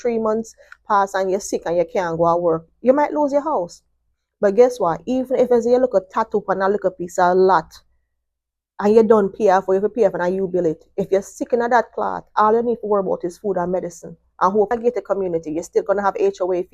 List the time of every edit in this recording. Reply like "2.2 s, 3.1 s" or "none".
14.7 s